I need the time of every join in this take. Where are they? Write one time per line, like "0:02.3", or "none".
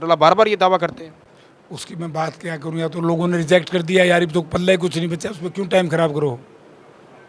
none